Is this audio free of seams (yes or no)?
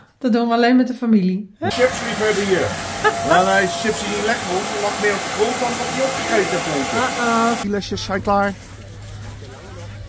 no